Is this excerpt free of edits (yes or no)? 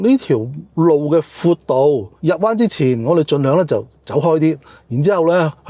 yes